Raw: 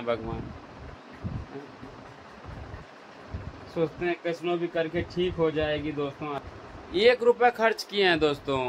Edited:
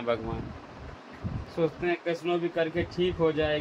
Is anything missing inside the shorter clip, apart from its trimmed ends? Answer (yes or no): yes